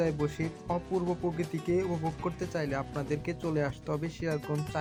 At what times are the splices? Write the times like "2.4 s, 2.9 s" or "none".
none